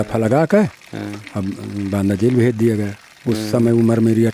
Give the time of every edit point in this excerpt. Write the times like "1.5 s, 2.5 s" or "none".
none